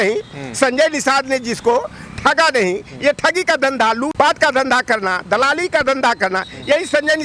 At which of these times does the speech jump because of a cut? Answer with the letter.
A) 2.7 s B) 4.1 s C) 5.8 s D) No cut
B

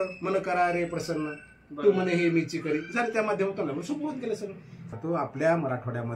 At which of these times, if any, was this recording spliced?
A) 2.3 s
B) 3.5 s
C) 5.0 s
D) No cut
C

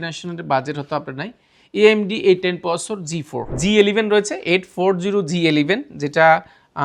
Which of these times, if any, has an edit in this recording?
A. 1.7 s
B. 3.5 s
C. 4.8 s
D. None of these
B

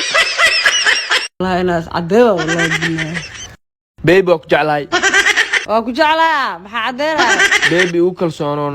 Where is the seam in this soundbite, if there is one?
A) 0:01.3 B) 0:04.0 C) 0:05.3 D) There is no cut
A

